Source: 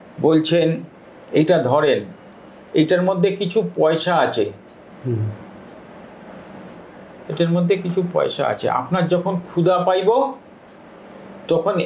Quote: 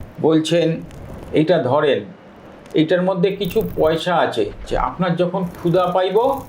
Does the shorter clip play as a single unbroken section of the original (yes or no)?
no